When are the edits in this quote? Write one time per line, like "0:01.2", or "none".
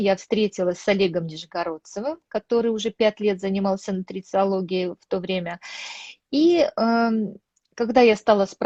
none